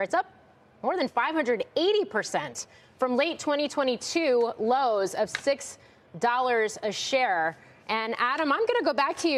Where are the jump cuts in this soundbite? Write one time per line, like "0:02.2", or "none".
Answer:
none